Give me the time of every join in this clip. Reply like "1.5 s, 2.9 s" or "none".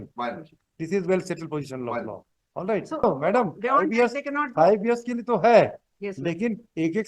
3.0 s